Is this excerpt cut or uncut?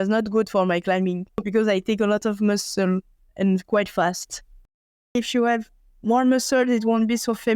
cut